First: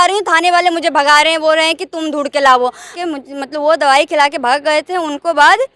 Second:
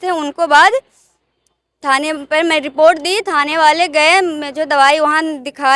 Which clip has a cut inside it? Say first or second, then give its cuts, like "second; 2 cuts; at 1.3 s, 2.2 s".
first; 1 cut; at 3.0 s